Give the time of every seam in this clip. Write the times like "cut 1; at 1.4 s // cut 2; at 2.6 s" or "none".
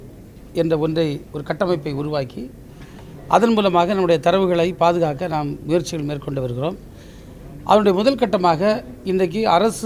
none